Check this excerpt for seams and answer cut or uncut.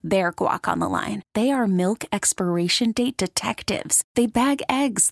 uncut